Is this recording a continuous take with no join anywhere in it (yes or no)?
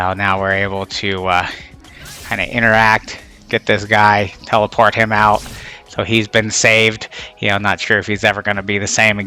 yes